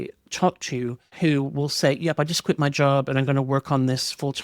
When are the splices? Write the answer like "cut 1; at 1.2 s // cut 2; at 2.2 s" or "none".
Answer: cut 1; at 1.0 s